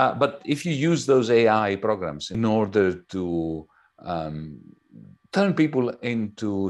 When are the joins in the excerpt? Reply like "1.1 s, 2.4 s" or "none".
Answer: 2.3 s